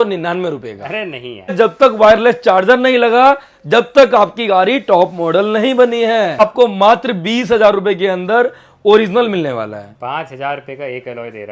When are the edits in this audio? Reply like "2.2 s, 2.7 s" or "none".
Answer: 1.5 s, 6.4 s